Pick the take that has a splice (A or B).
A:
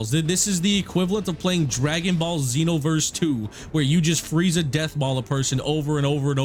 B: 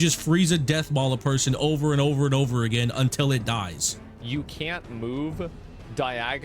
B